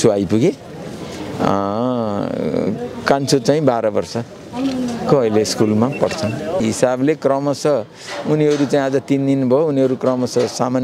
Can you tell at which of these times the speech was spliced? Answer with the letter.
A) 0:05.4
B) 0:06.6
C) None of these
B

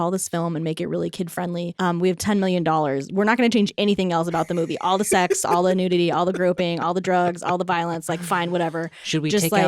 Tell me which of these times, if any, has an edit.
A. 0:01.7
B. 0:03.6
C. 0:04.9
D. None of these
A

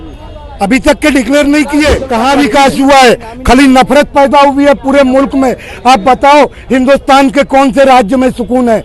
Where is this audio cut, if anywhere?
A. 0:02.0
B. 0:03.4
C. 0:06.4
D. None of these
A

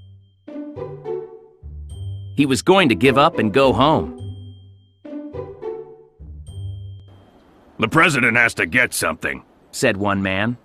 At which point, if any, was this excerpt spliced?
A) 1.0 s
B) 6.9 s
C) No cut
C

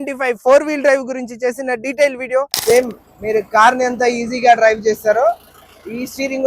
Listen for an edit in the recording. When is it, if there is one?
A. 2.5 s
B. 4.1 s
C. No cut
A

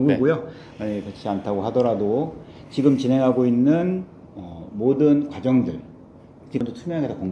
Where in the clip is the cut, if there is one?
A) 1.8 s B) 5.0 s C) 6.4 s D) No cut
C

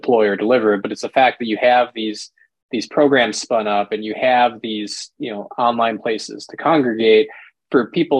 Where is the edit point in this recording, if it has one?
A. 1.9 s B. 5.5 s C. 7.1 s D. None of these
D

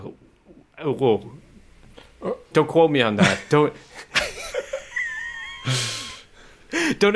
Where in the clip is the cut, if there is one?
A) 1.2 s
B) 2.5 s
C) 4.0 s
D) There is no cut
B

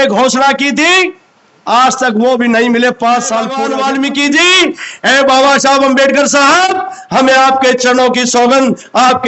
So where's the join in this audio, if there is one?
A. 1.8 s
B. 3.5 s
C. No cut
B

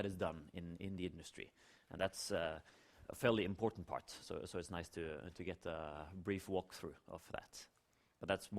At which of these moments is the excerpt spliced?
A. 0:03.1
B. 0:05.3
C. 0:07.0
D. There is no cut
B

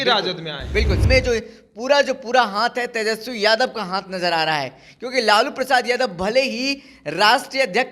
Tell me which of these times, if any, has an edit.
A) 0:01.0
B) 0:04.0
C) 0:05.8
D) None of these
A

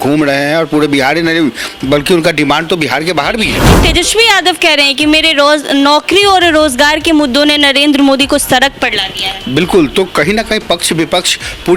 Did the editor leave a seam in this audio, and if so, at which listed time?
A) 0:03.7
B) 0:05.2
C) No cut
A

